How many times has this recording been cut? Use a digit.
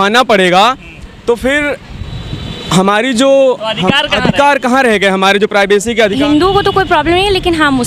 1